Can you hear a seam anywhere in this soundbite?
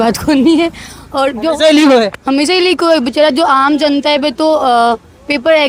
no; 0 cuts

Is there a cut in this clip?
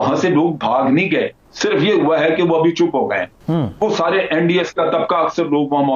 yes; 2 cuts; at 1.4 s, 3.3 s

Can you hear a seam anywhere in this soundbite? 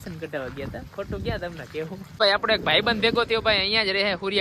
yes; 1 cut; at 2.1 s

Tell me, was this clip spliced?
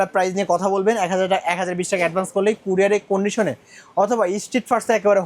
no; 0 cuts

